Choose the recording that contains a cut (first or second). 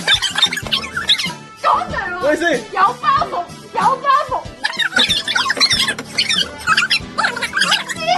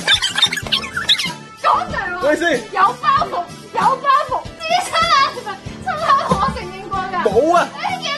second